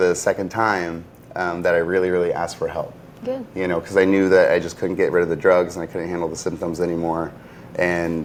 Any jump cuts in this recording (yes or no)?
no